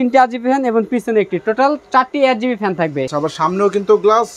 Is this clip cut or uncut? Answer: cut